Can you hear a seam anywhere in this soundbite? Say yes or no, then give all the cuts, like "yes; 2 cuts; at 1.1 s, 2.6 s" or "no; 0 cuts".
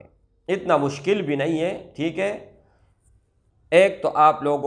no; 0 cuts